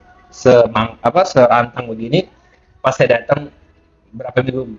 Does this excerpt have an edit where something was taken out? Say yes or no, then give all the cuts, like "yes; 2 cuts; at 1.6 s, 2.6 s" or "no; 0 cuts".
no; 0 cuts